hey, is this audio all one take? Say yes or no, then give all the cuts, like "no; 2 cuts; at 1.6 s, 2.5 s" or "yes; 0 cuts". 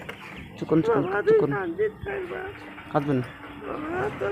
yes; 0 cuts